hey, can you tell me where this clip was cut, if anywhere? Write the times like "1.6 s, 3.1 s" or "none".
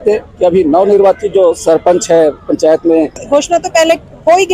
3.2 s